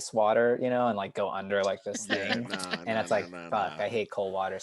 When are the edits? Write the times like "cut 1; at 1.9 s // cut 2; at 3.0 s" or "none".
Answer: none

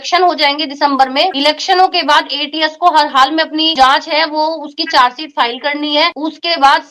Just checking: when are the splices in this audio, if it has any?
none

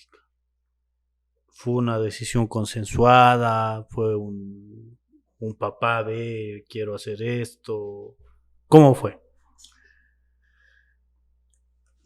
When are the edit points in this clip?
none

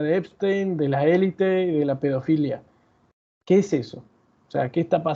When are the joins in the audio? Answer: none

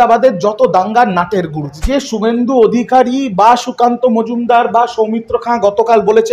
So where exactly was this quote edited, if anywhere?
cut 1; at 1.8 s

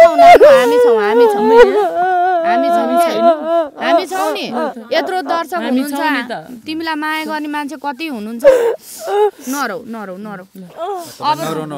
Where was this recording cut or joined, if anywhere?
none

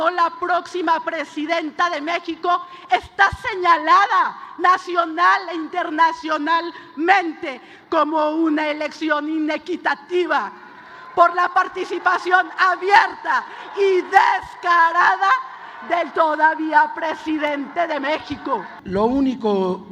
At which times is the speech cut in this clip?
cut 1; at 18.8 s

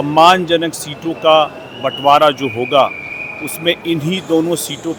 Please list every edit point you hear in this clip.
none

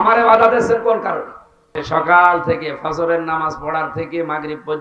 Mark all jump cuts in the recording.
cut 1; at 1.8 s

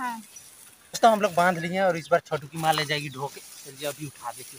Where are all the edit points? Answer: cut 1; at 1.0 s

